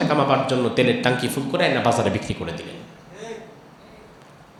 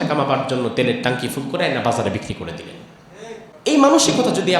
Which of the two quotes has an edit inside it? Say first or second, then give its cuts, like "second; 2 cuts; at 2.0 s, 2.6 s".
second; 1 cut; at 3.5 s